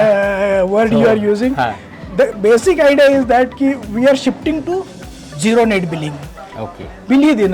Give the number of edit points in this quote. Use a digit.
0